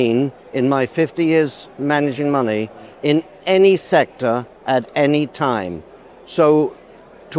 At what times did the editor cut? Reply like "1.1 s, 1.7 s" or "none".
none